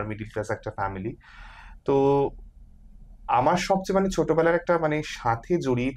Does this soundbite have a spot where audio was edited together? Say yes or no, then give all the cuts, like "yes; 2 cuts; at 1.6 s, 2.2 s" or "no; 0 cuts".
no; 0 cuts